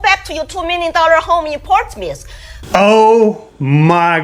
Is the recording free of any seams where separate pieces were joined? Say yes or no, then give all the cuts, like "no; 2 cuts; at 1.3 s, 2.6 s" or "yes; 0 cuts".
no; 1 cut; at 2.6 s